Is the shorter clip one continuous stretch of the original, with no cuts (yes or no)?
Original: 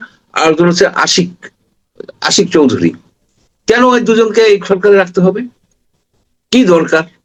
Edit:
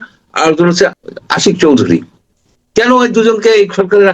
no